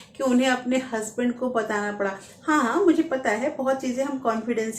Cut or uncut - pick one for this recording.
uncut